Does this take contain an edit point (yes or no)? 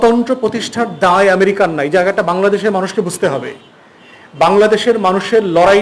no